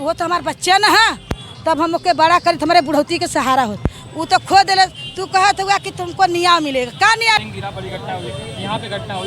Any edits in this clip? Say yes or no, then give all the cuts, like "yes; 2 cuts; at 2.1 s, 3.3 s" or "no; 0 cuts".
yes; 1 cut; at 7.4 s